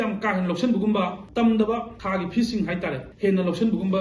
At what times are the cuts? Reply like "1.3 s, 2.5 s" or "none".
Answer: 1.2 s, 1.9 s, 3.0 s